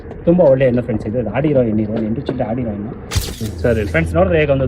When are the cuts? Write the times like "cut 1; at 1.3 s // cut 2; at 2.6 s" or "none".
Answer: cut 1; at 3.4 s